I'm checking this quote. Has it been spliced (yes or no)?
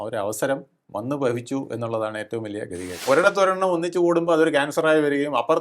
yes